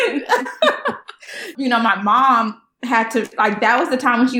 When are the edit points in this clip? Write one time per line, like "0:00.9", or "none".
0:01.5